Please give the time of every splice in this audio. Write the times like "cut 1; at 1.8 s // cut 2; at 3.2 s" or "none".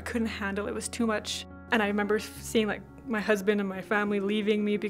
cut 1; at 1.5 s